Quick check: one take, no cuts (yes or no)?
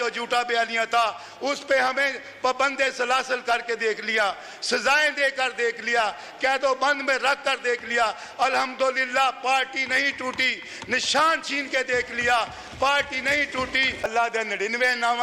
no